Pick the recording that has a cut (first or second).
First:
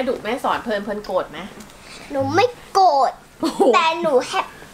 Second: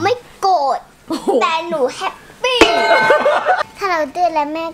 second